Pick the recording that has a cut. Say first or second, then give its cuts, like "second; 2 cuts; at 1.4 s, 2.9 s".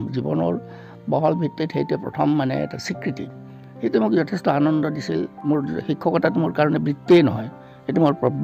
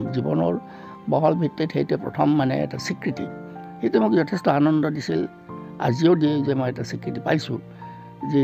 first; 1 cut; at 5.3 s